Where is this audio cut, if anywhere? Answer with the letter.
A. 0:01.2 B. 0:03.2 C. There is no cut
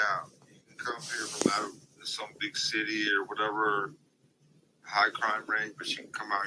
C